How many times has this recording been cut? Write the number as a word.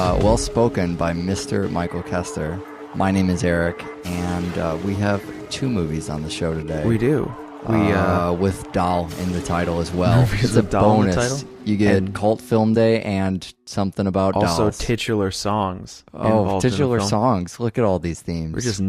zero